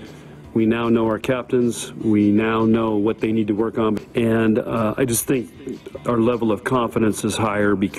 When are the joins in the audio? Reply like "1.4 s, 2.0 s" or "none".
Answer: none